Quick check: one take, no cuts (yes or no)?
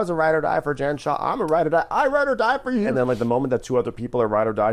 no